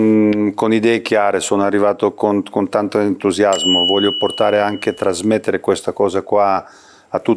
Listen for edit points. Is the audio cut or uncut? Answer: uncut